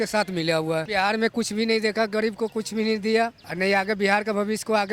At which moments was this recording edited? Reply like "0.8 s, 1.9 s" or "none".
0.9 s, 3.4 s